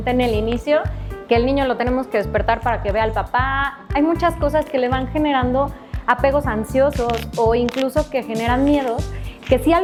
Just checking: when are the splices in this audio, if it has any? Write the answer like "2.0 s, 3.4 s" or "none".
none